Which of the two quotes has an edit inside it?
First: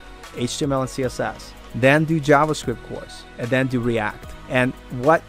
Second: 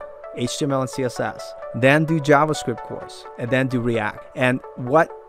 second; 1 cut; at 4.2 s

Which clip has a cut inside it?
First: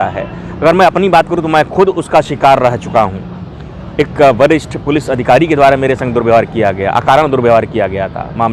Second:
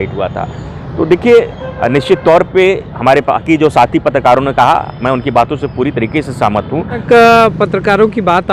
second; 1 cut; at 7.0 s

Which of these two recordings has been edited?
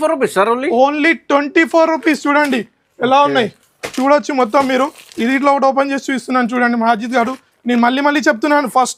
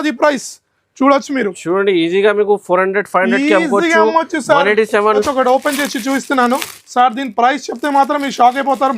second; 1 cut; at 5.2 s

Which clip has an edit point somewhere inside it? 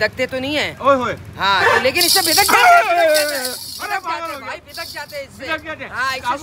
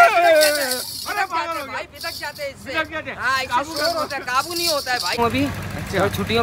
second; 1 cut; at 5.2 s

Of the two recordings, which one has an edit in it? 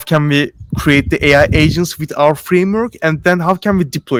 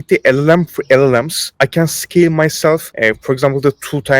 second; 2 cuts; at 1.4 s, 2.9 s

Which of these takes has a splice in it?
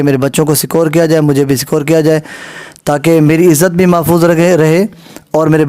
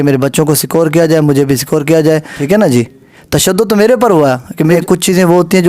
second; 2 cuts; at 2.3 s, 4.8 s

